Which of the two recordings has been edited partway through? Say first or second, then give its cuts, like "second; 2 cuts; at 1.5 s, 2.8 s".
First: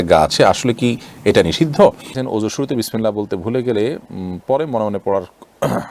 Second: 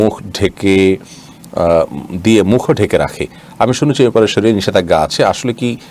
first; 1 cut; at 2.1 s